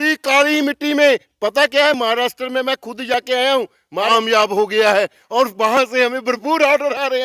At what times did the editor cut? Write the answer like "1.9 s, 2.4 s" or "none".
4.1 s